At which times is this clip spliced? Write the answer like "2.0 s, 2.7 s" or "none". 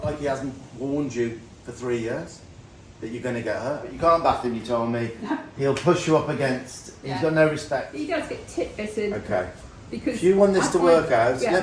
3.9 s, 7.9 s